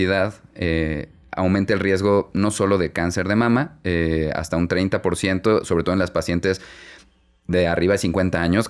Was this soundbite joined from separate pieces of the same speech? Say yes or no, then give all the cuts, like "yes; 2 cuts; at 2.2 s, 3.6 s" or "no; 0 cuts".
no; 0 cuts